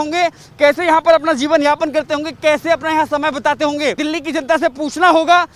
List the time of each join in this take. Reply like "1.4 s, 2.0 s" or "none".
4.0 s